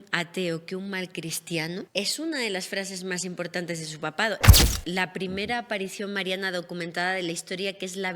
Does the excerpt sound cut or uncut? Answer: cut